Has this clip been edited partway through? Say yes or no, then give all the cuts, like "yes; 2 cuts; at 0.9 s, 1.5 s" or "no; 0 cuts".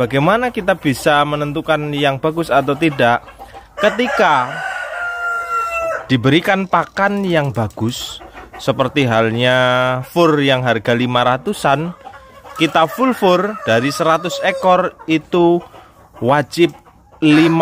no; 0 cuts